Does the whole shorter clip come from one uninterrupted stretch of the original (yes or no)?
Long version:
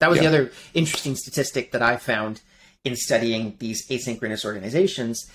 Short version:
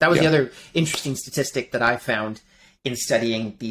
yes